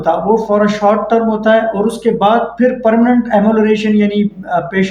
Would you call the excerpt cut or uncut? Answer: uncut